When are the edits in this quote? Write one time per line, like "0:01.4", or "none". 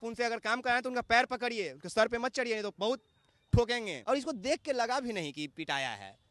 0:03.9